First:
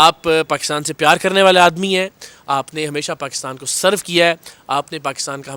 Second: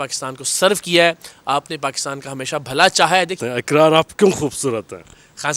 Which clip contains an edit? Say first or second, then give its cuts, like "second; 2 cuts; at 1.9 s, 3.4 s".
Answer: second; 1 cut; at 3.4 s